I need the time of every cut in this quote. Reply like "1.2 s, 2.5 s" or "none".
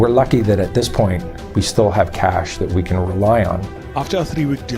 3.8 s